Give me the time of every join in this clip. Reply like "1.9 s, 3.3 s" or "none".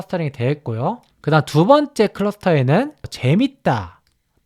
1.1 s, 3.1 s